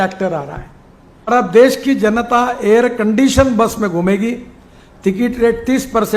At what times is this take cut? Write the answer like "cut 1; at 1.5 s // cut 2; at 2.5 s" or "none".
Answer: cut 1; at 1.3 s